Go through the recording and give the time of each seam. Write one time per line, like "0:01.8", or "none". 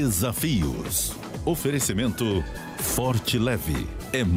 none